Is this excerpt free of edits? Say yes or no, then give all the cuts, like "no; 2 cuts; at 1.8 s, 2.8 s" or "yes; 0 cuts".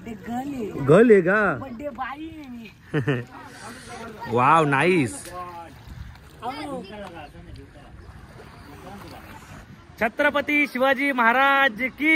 no; 1 cut; at 9.7 s